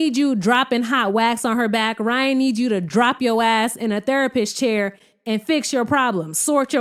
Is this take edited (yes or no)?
no